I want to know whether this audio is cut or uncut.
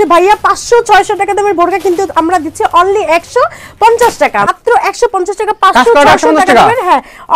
cut